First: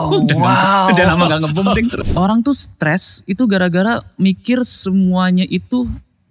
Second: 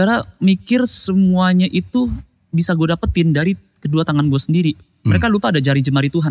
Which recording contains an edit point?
first; 1 cut; at 2.0 s

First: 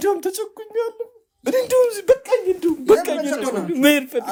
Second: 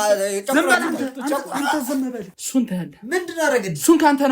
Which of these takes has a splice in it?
second; 1 cut; at 2.3 s

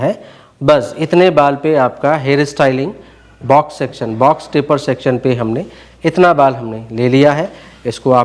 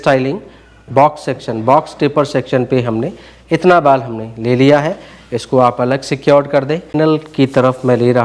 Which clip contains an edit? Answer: second; 1 cut; at 6.8 s

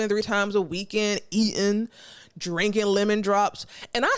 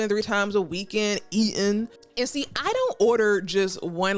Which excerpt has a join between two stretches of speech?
second; 1 cut; at 2.0 s

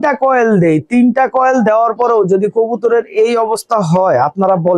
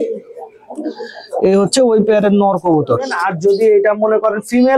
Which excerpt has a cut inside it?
second; 1 cut; at 3.3 s

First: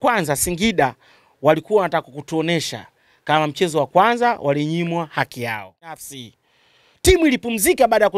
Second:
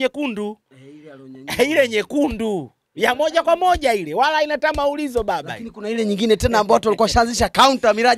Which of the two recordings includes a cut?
first; 1 cut; at 6.1 s

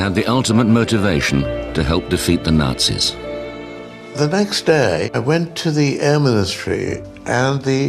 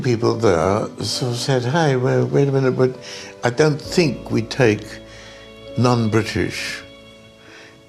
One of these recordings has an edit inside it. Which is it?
first; 1 cut; at 6.6 s

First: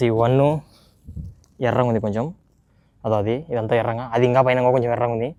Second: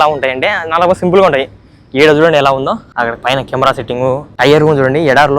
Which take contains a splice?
second; 2 cuts; at 2.9 s, 4.3 s

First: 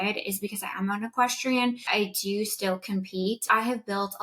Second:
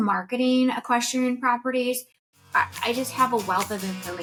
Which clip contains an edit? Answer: first; 2 cuts; at 1.9 s, 3.5 s

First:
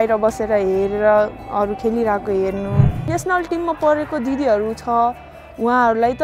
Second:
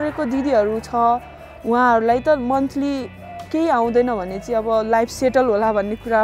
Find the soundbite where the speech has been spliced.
first; 1 cut; at 3.0 s

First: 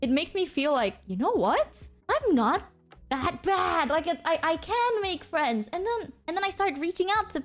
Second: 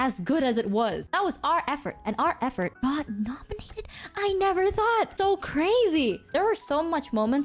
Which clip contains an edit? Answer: second; 4 cuts; at 1.0 s, 2.7 s, 5.1 s, 6.2 s

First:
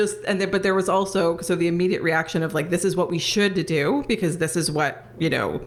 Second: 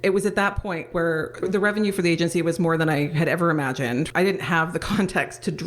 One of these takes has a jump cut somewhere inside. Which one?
second; 2 cuts; at 0.9 s, 4.1 s

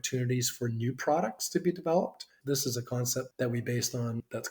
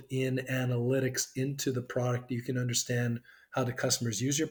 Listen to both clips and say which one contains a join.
first; 2 cuts; at 2.4 s, 3.3 s

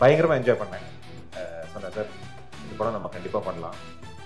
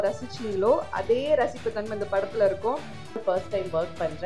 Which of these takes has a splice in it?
second; 1 cut; at 3.2 s

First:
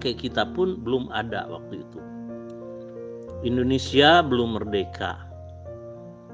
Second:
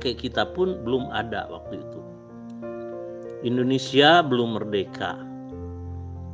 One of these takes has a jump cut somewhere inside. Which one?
first; 2 cuts; at 1.5 s, 3.4 s

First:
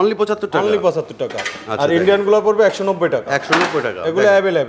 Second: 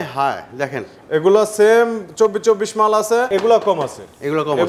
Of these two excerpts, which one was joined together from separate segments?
second; 1 cut; at 3.3 s

